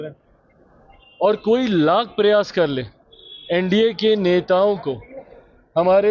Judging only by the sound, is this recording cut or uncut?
uncut